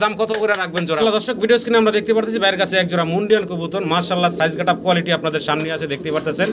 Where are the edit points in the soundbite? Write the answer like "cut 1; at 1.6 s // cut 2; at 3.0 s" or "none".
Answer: cut 1; at 1.0 s